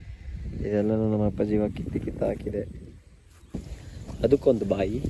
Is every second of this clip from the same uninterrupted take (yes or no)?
no